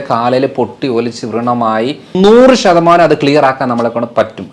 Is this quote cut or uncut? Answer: cut